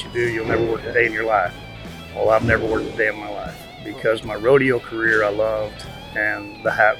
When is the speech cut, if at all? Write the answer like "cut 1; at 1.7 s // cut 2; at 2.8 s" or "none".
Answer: none